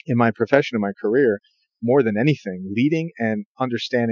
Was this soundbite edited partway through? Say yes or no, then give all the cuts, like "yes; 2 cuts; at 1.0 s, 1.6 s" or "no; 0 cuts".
no; 0 cuts